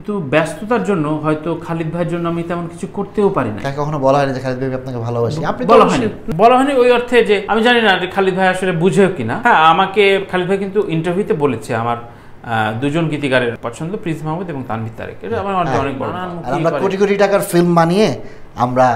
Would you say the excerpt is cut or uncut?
cut